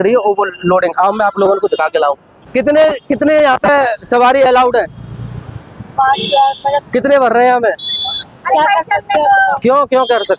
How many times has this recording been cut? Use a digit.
1